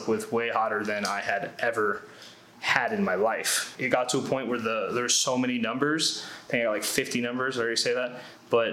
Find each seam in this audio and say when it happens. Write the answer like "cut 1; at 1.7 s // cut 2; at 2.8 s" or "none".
cut 1; at 3.7 s